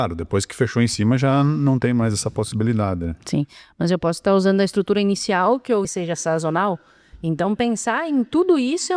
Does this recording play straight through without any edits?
no; 1 cut; at 5.9 s

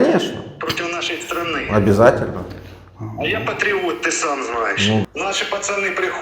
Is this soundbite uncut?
no; 1 cut; at 5.0 s

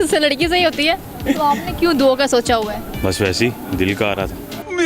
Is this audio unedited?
no; 2 cuts; at 1.1 s, 2.9 s

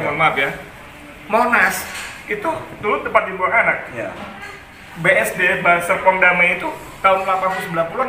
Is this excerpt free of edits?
yes; 0 cuts

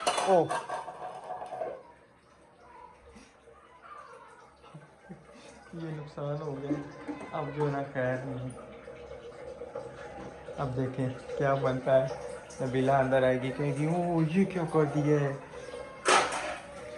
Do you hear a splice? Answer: no; 0 cuts

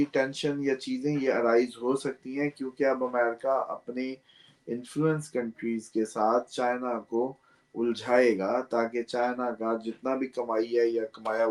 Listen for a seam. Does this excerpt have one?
no; 0 cuts

